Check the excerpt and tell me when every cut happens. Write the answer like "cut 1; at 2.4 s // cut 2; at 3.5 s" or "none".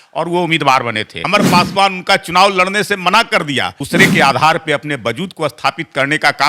cut 1; at 1.3 s // cut 2; at 3.8 s